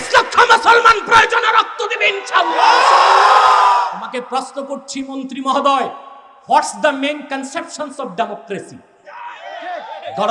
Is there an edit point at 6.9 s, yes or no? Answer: no